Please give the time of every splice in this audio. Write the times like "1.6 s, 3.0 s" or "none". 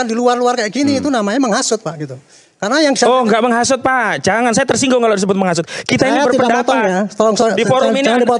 none